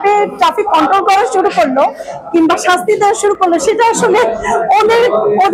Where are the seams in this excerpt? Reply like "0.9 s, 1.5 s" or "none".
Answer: none